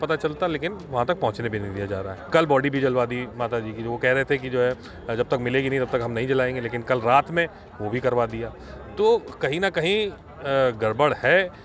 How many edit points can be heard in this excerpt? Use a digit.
1